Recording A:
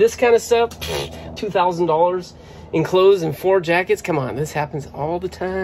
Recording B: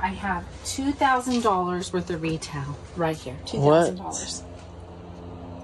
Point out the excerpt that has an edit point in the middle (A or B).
A